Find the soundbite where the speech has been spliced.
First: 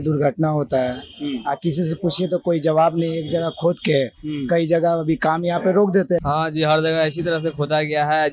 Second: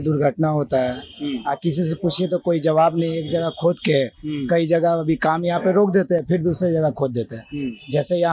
first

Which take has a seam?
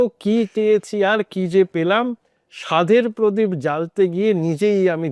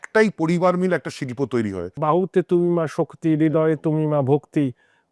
second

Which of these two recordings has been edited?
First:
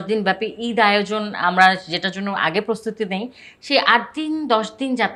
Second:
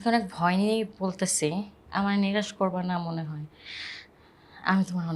second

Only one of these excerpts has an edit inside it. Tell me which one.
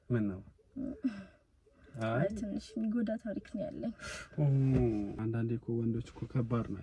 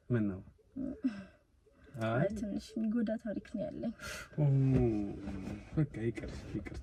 first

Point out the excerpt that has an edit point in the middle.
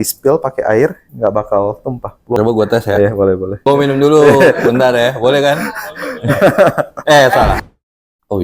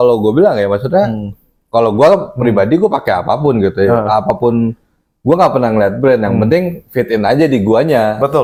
first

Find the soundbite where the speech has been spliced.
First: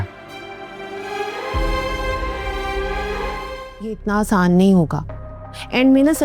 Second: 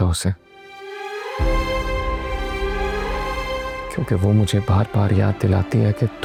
first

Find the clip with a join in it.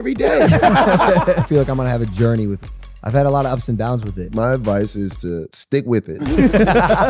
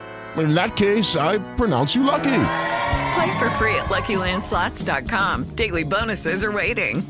first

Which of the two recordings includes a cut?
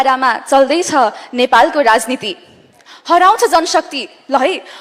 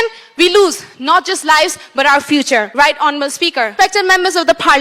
second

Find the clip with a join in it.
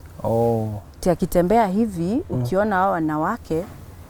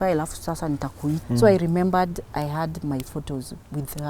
second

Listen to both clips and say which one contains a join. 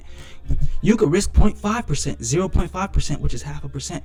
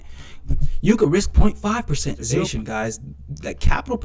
second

